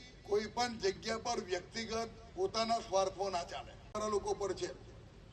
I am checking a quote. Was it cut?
yes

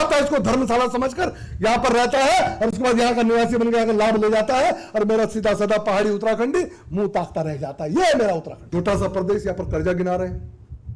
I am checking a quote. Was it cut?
yes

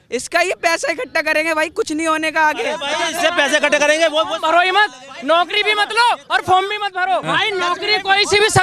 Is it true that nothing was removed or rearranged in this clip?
no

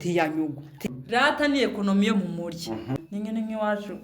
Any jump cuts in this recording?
yes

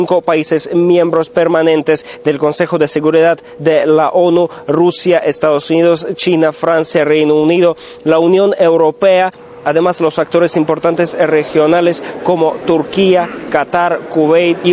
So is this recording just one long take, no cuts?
no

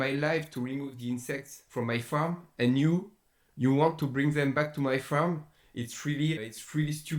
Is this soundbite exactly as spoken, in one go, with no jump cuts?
yes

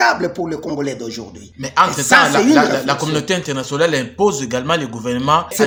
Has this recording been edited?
no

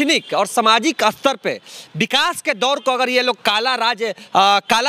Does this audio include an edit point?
no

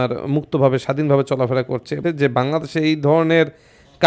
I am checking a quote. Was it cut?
yes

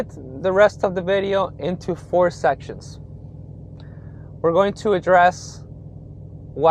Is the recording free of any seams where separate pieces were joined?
yes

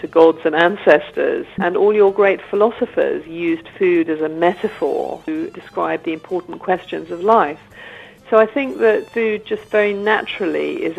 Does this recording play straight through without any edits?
no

